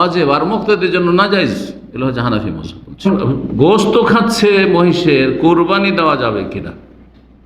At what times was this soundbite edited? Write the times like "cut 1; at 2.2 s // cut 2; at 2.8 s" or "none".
cut 1; at 3.1 s

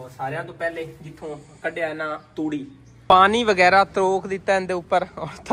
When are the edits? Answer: cut 1; at 2.9 s

